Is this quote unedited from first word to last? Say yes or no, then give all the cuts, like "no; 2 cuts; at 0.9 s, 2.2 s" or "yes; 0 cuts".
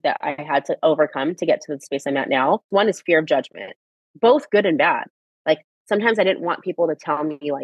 no; 1 cut; at 2.6 s